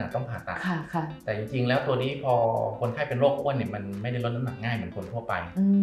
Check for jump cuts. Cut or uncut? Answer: uncut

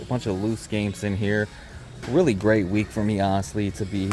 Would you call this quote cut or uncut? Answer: uncut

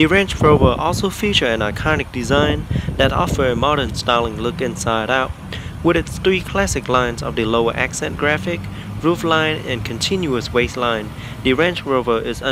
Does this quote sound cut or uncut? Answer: cut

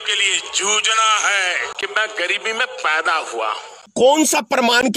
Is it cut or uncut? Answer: cut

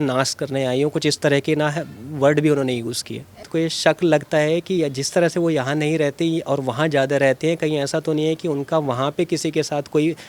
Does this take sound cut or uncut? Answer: cut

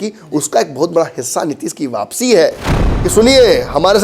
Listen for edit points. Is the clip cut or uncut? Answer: cut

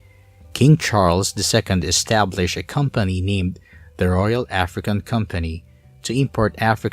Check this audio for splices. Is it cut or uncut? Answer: cut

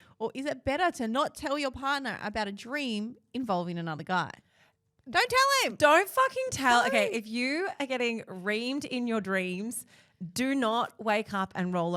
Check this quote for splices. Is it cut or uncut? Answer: uncut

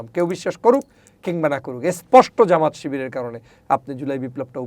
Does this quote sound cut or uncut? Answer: uncut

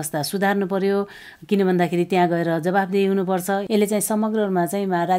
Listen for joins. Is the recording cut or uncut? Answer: cut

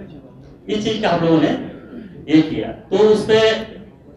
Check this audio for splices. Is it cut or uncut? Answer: uncut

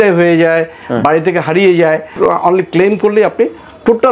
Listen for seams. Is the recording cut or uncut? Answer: cut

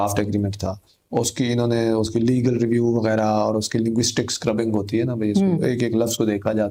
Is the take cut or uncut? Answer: uncut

